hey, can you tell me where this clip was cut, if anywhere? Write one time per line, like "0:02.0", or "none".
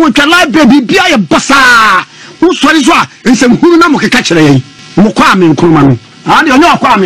0:04.8